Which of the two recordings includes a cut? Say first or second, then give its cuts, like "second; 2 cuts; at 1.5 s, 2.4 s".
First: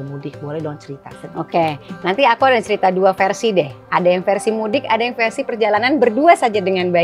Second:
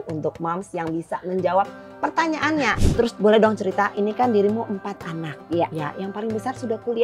second; 1 cut; at 2.8 s